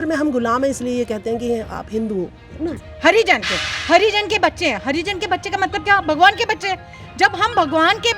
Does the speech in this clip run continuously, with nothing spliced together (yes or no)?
no